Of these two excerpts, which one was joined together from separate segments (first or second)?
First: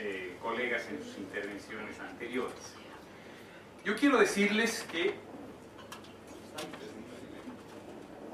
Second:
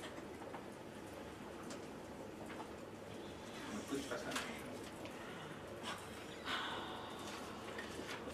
second